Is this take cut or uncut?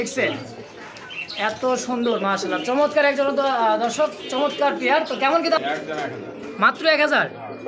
cut